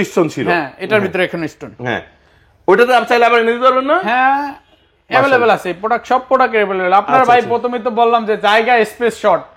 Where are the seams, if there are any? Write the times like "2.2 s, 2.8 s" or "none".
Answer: none